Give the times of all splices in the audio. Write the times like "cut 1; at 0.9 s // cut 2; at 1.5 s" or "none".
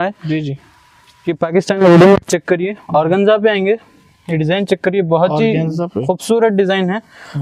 none